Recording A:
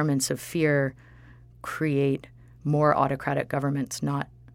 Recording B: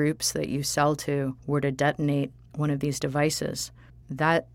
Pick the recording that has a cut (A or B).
B